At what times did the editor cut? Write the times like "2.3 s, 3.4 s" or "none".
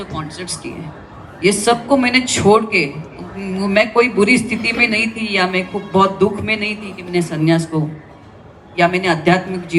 none